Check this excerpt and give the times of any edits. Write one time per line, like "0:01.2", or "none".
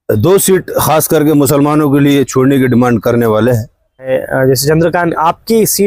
0:04.1